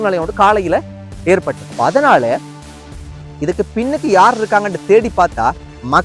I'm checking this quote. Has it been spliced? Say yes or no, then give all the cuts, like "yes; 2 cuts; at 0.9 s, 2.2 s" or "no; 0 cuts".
yes; 1 cut; at 1.6 s